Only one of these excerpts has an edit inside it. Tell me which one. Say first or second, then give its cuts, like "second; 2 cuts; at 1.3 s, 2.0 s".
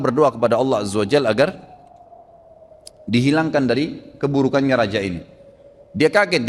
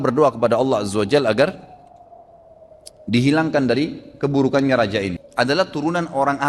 second; 1 cut; at 5.2 s